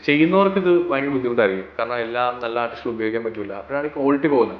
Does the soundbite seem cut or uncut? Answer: uncut